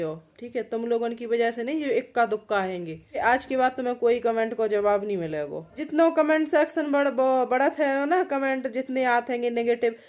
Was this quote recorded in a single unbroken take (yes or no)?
no